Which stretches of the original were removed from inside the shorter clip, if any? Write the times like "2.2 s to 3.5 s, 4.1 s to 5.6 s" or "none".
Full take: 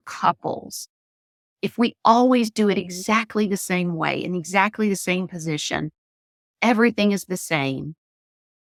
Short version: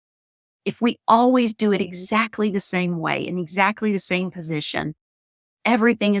none